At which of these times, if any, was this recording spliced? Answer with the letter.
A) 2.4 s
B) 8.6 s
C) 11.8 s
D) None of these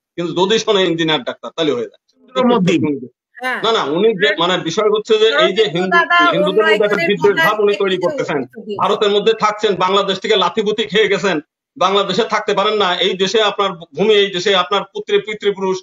A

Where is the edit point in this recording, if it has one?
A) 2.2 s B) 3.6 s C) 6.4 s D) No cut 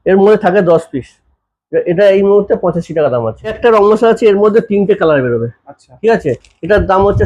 B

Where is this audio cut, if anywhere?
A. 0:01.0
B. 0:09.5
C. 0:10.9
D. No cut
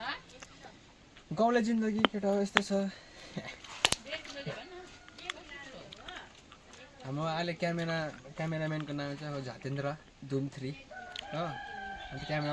D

